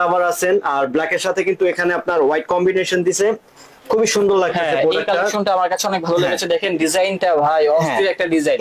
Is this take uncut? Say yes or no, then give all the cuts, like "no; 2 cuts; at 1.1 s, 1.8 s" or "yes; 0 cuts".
yes; 0 cuts